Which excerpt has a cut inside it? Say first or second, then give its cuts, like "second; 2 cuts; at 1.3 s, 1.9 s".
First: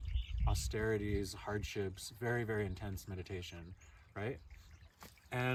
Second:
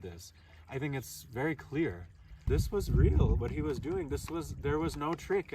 second; 1 cut; at 2.3 s